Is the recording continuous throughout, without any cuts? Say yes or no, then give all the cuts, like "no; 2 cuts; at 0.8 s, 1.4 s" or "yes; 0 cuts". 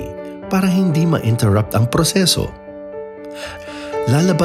yes; 0 cuts